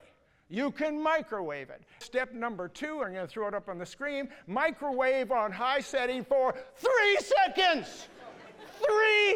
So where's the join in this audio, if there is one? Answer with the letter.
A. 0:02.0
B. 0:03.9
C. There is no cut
A